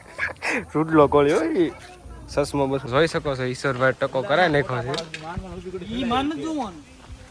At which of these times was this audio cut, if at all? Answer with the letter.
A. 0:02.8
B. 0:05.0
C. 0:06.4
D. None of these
A